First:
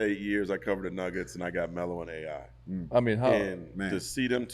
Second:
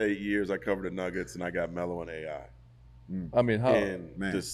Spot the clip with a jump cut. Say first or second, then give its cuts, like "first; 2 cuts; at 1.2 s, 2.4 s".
first; 1 cut; at 2.5 s